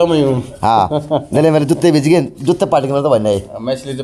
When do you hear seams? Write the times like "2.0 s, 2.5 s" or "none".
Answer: none